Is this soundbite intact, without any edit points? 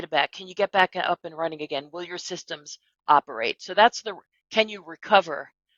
yes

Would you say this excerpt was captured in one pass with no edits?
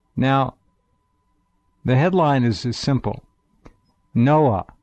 no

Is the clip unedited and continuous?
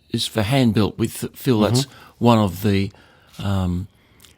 yes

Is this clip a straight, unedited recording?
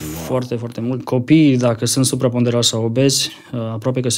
no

